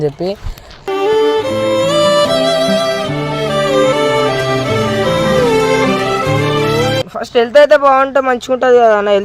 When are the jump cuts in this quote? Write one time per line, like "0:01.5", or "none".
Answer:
0:07.1